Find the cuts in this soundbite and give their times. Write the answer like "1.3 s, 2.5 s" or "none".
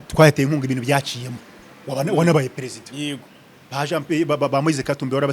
none

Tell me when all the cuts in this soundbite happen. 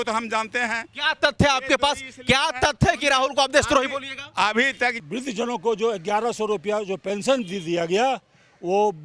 5.0 s

